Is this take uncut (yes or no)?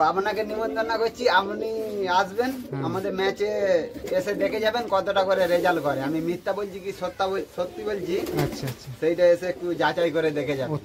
yes